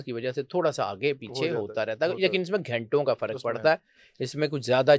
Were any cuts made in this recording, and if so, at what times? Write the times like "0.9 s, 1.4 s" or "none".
none